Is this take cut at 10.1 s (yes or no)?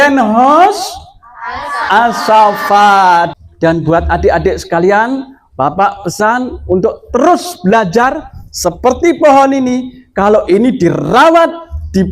no